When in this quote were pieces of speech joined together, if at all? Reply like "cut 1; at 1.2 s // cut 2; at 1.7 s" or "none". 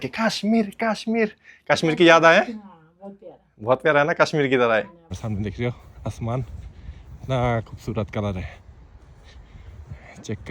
cut 1; at 5.2 s